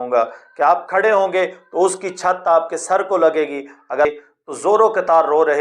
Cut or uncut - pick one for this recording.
cut